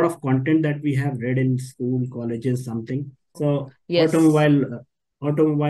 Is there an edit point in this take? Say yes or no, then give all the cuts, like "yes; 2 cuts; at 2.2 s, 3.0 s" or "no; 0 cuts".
yes; 1 cut; at 3.2 s